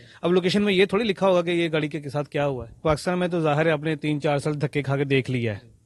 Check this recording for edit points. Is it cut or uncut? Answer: cut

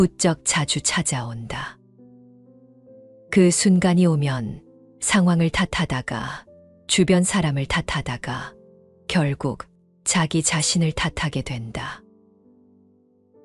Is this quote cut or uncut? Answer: cut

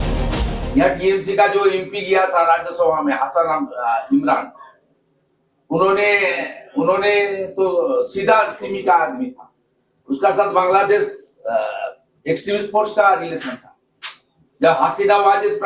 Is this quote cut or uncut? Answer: cut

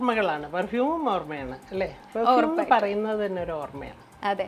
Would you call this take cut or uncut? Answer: uncut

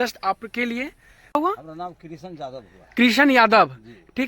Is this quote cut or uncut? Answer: cut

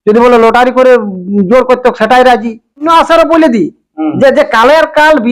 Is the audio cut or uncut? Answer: cut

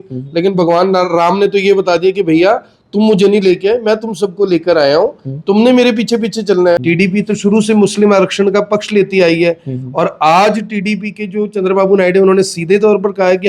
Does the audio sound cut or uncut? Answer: cut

